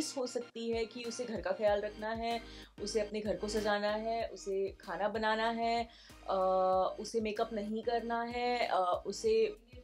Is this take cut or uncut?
uncut